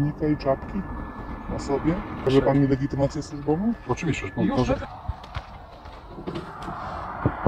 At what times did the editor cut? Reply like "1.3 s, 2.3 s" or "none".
2.3 s, 4.9 s